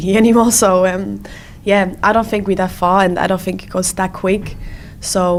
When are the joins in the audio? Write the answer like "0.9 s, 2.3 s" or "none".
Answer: none